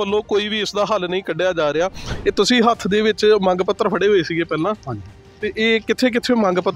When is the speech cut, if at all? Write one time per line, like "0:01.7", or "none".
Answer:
0:02.1

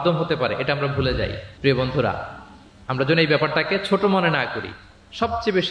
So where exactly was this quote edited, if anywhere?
none

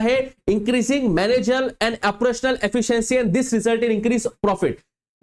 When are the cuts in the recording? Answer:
none

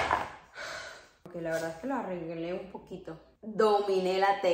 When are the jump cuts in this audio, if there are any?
0:03.3

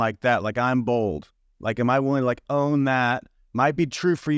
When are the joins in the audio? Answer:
none

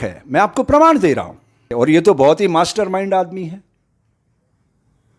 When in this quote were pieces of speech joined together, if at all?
0:01.7

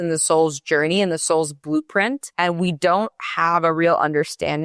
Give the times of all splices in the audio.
0:02.3

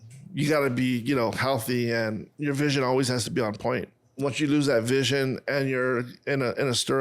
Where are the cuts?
0:02.3
0:04.2

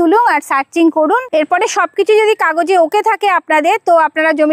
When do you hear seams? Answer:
none

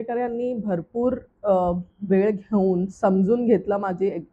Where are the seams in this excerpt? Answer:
none

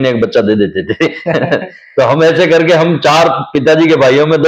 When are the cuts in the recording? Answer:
none

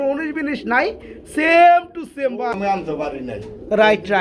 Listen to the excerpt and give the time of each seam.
0:02.5

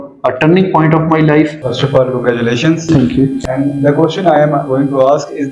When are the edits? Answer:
0:01.6

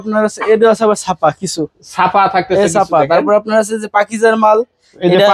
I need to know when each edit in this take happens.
none

